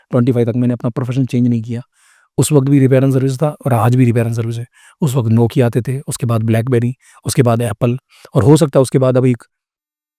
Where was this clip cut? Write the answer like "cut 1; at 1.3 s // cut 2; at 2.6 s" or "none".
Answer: none